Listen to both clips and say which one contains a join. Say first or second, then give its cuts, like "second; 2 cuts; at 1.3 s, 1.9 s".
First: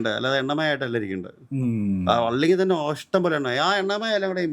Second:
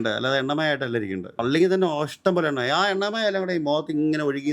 second; 1 cut; at 1.4 s